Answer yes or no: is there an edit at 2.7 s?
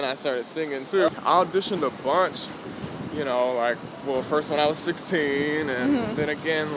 no